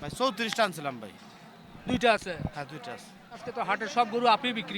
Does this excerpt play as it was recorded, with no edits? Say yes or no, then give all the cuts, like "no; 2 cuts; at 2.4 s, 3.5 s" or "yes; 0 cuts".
yes; 0 cuts